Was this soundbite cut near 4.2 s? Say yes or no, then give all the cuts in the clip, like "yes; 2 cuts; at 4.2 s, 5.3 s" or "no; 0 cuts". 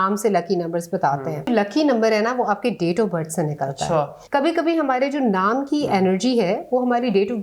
yes; 2 cuts; at 1.5 s, 4.2 s